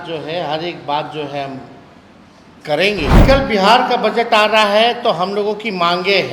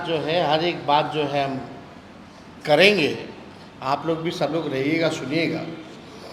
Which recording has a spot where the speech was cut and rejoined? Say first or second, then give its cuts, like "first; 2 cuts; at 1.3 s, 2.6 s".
first; 1 cut; at 3.2 s